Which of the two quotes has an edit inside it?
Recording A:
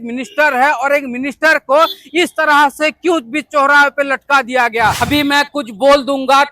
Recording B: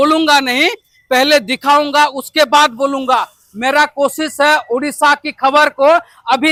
A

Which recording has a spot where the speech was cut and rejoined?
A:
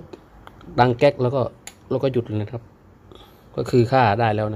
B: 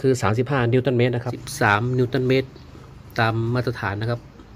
B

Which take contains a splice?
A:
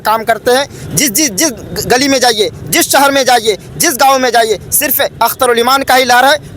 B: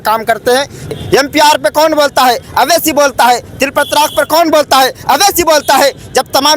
B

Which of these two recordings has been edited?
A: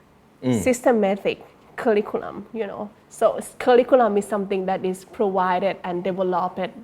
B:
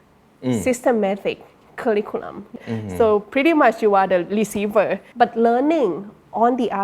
B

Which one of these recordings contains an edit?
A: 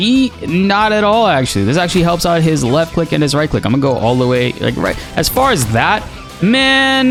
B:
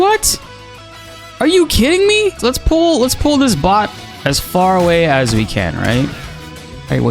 B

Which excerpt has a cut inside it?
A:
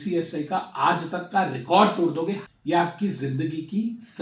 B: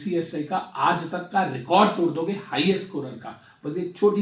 A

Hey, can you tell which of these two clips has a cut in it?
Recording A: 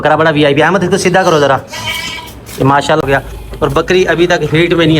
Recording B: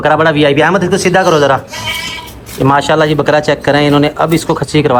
A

